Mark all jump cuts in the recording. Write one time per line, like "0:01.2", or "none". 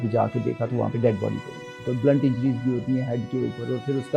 0:01.7